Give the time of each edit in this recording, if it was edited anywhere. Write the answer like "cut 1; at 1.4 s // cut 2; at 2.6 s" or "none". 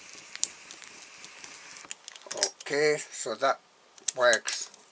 none